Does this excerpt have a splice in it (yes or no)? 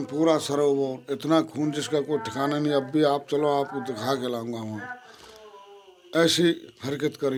no